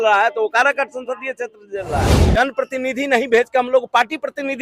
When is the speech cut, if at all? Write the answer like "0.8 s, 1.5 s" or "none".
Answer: 2.3 s